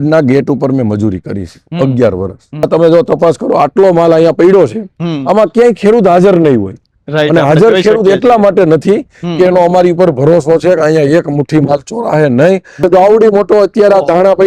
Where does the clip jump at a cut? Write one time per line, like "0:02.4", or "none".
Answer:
0:02.7
0:12.8